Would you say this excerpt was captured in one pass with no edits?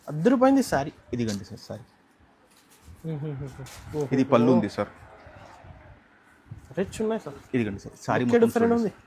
yes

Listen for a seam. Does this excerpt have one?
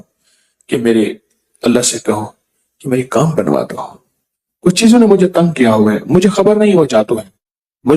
no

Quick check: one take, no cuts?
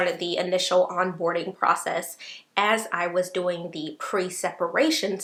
yes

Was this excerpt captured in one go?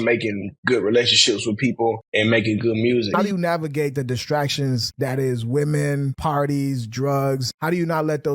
no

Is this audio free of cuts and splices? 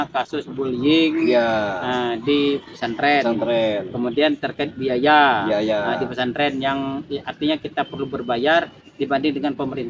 yes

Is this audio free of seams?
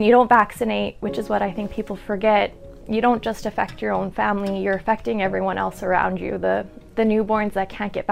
yes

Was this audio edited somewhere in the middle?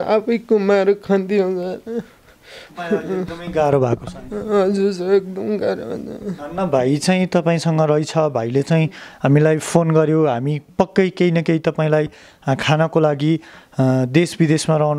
no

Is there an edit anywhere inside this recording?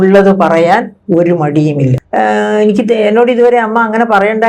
yes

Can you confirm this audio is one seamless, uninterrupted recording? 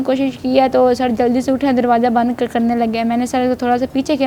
yes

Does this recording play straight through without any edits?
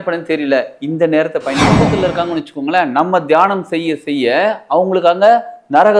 no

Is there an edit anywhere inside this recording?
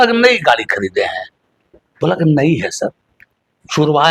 no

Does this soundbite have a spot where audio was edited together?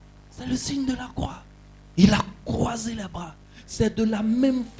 no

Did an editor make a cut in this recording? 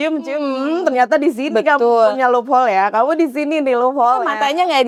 no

